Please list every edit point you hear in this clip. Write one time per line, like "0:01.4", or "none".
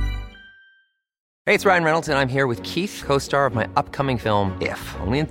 0:01.2